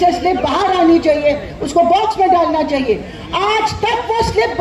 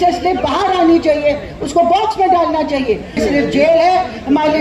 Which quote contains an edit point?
second; 1 cut; at 3.2 s

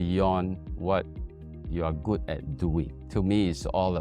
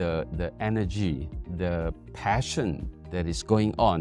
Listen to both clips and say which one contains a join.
first; 1 cut; at 3.0 s

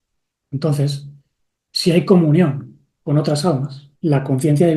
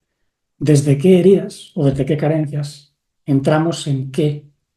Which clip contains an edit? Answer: first; 1 cut; at 3.8 s

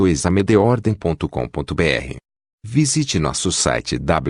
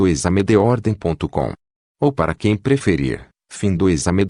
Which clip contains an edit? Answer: first; 1 cut; at 1.2 s

